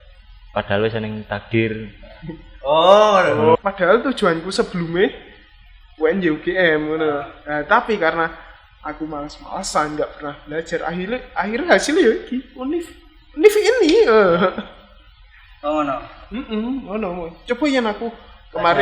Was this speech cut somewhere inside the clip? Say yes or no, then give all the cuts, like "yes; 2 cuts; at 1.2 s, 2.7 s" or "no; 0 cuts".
yes; 1 cut; at 3.6 s